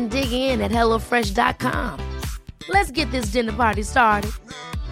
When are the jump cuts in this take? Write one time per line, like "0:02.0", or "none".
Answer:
none

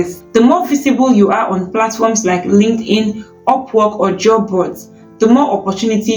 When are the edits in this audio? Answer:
none

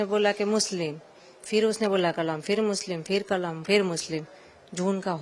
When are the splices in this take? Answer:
none

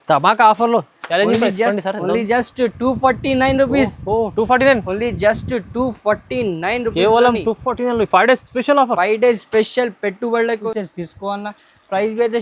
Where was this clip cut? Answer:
0:01.7
0:10.6

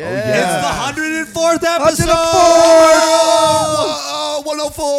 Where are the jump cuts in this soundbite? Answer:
none

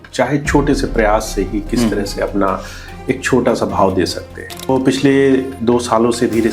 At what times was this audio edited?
0:04.7

